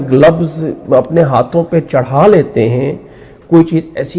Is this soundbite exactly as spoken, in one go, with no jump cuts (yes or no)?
yes